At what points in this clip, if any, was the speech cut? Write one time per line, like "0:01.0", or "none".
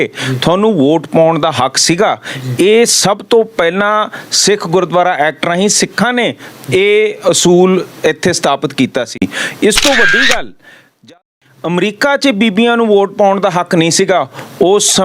0:11.2